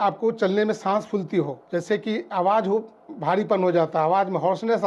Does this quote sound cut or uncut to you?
uncut